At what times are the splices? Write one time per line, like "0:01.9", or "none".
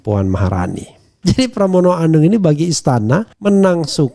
0:01.1